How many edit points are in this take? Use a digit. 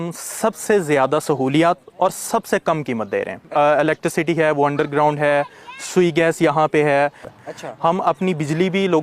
2